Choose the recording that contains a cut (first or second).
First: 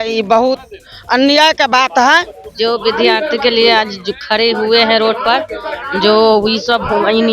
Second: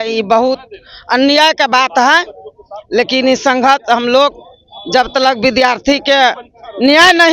first